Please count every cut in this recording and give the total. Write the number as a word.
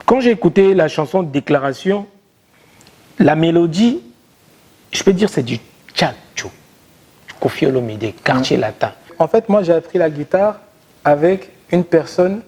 one